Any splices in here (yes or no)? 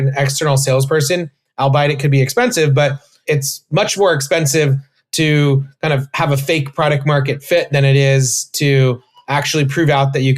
no